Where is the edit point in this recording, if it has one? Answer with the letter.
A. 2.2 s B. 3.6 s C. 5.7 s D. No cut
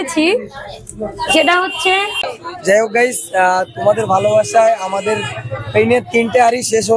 A